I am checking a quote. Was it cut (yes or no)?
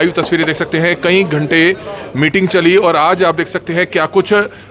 no